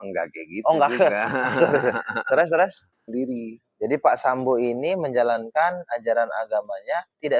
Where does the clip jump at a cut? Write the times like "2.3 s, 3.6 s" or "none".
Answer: 3.1 s